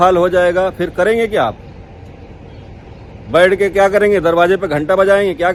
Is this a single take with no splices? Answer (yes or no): yes